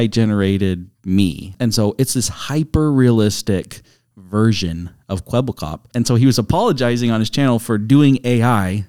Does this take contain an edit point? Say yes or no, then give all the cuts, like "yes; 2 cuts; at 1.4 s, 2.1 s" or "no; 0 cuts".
yes; 2 cuts; at 1.5 s, 5.8 s